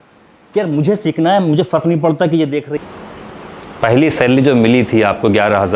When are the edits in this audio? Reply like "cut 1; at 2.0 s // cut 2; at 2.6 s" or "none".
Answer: cut 1; at 2.7 s